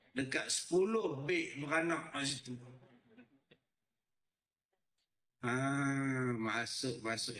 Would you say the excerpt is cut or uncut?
uncut